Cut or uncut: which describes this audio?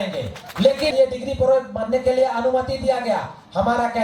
cut